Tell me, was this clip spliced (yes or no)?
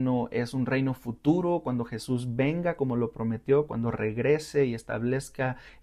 no